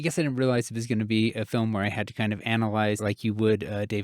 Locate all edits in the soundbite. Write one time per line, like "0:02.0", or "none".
0:03.0